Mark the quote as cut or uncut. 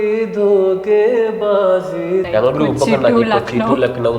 cut